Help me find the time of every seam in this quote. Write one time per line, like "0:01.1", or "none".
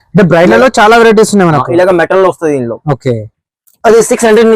none